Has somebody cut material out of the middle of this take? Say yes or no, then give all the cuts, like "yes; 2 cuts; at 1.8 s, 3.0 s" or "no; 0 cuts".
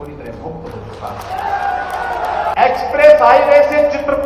yes; 1 cut; at 2.5 s